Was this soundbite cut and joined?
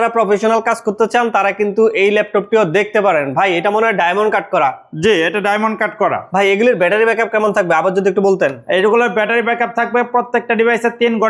no; 0 cuts

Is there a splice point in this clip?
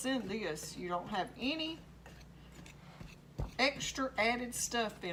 no; 0 cuts

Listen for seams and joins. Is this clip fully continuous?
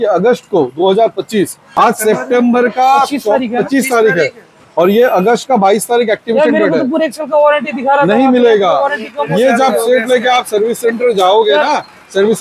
no; 1 cut; at 1.7 s

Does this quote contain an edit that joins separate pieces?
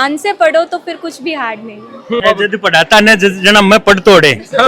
yes; 1 cut; at 2.0 s

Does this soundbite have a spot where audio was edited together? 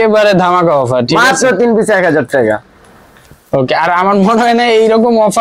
no; 0 cuts

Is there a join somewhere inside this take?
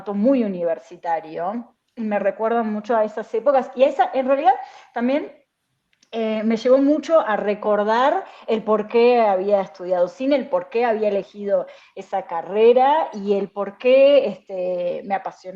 no; 0 cuts

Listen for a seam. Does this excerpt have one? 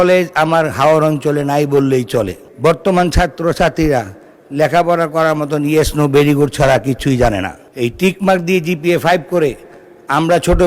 yes; 2 cuts; at 2.4 s, 7.6 s

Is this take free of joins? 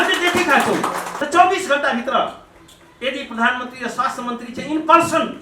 no; 1 cut; at 1.1 s

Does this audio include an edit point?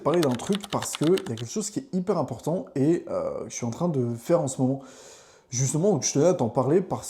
no; 0 cuts

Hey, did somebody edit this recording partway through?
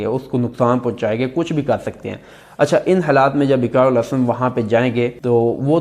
no; 0 cuts

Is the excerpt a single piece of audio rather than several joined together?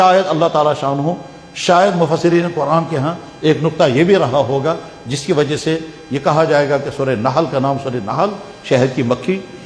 yes; 0 cuts

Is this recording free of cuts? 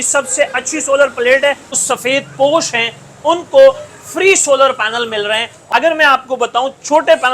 no; 2 cuts; at 1.8 s, 5.6 s

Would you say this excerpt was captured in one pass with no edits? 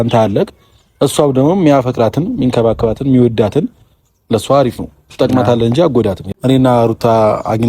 no; 1 cut; at 6.3 s

